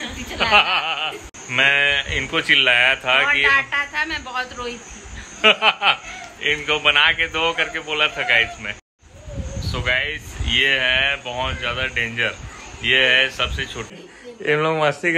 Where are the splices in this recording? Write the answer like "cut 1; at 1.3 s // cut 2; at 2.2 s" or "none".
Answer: cut 1; at 1.3 s // cut 2; at 14.0 s

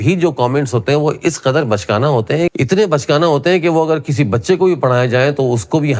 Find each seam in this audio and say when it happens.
none

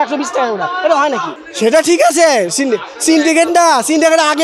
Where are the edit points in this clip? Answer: cut 1; at 1.3 s

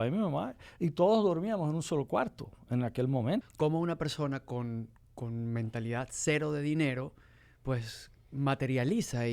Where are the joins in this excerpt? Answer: cut 1; at 3.5 s

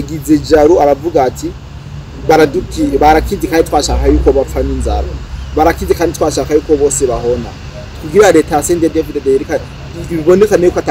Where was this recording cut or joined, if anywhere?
none

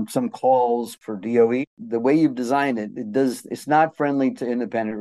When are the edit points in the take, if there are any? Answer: cut 1; at 0.9 s // cut 2; at 1.8 s

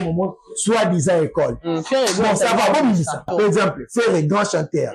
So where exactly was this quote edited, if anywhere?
cut 1; at 3.3 s

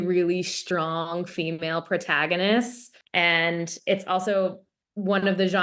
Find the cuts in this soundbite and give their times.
cut 1; at 2.8 s

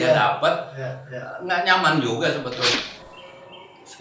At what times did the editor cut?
cut 1; at 2.8 s

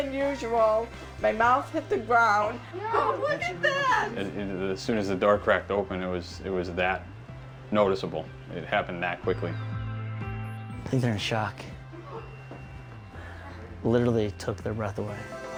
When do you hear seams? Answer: none

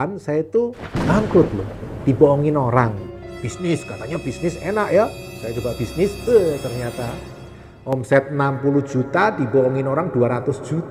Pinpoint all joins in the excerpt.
none

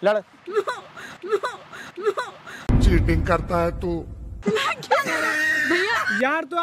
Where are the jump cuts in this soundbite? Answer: none

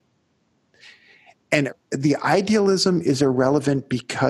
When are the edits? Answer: cut 1; at 1.7 s

